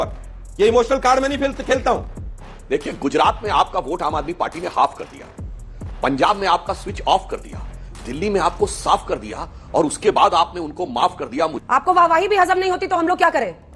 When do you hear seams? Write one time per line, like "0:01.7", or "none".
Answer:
0:02.2
0:11.6